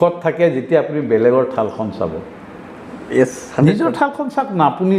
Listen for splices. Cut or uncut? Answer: uncut